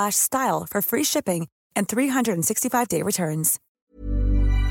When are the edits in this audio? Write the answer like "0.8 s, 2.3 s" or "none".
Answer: 3.8 s